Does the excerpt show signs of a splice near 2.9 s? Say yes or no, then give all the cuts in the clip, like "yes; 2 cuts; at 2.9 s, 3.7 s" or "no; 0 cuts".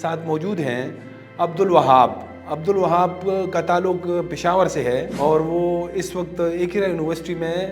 no; 1 cut; at 5.1 s